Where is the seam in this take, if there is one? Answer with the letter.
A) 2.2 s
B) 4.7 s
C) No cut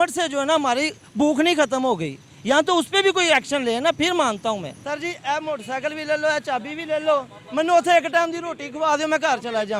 B